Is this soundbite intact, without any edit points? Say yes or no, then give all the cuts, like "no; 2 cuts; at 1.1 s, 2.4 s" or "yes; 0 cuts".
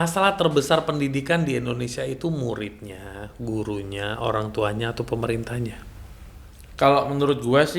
yes; 0 cuts